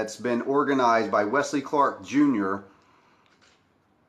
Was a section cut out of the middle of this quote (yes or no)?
no